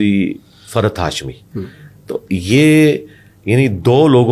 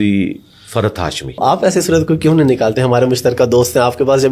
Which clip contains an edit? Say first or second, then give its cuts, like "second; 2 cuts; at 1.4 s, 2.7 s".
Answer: second; 1 cut; at 1.4 s